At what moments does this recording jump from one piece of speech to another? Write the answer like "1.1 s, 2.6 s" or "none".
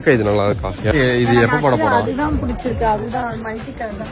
0.9 s

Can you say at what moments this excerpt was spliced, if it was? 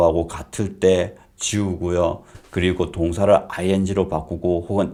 none

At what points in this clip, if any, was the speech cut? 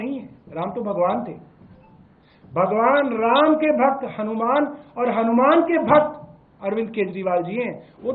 none

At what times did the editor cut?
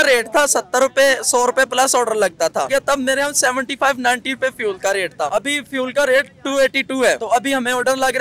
2.7 s, 5.3 s, 7.2 s

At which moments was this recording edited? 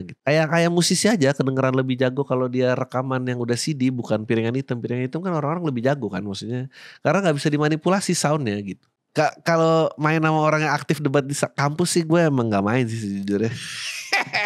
8.9 s

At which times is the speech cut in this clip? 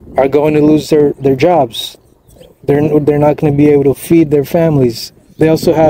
none

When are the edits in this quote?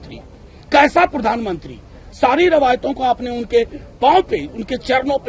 none

